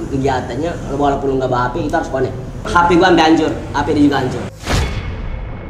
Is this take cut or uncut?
cut